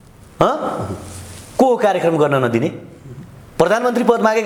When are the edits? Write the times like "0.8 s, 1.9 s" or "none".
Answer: none